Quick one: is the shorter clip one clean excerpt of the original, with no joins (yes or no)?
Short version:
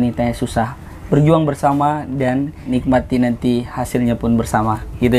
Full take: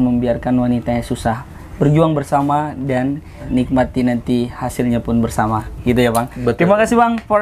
no